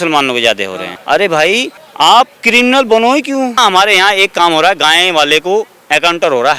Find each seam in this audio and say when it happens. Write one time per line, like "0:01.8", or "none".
0:00.9
0:01.8
0:03.6